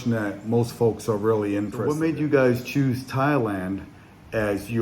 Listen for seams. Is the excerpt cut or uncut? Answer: cut